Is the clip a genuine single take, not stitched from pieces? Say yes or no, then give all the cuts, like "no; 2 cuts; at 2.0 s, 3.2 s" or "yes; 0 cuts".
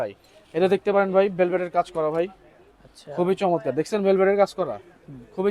yes; 0 cuts